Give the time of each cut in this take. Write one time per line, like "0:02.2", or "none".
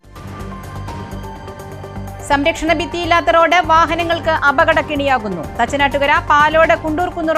none